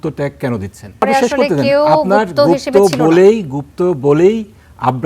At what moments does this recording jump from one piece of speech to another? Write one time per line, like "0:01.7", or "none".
0:01.0

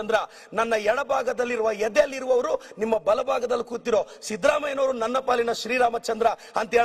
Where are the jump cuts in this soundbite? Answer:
none

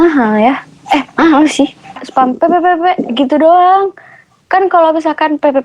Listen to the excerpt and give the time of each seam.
0:02.0

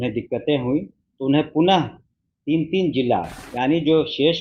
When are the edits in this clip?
0:03.4

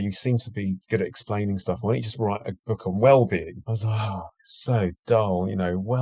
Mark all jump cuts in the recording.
none

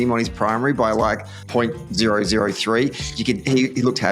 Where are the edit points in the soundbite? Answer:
0:01.3

